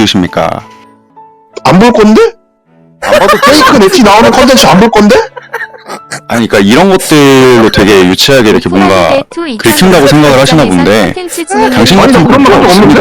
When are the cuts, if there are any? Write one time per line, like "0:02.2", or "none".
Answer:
none